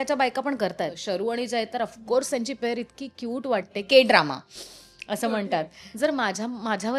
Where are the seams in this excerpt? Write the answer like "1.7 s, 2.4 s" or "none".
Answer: 1.0 s, 5.8 s